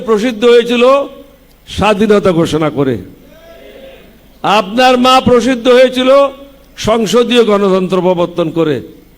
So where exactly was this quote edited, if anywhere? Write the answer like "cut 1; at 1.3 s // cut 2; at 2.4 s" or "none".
none